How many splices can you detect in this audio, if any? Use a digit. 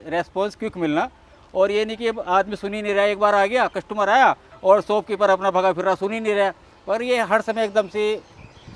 0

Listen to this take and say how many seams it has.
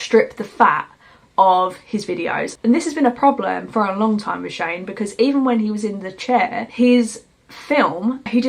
0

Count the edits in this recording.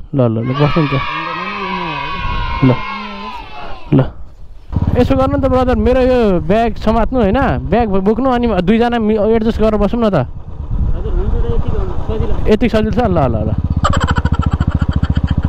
1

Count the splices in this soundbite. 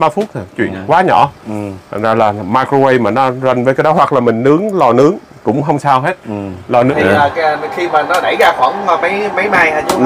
1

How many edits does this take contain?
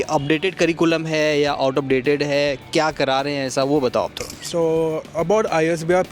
0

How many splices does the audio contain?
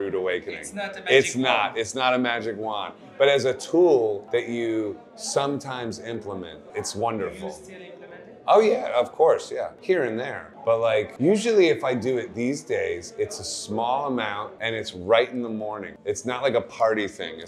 0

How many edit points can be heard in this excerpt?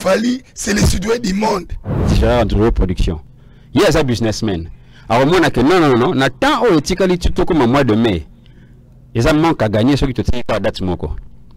1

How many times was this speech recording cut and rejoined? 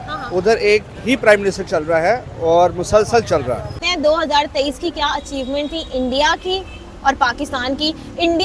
1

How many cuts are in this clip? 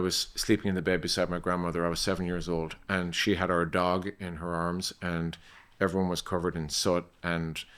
0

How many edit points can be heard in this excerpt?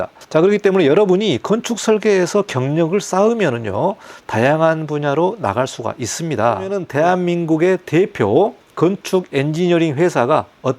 1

